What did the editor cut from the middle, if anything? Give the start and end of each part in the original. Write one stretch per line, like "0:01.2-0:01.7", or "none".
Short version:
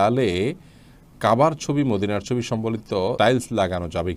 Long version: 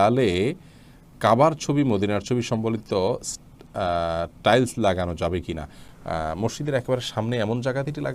0:03.1-0:04.4